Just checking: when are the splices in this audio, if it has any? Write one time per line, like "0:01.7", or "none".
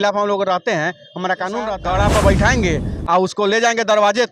0:01.7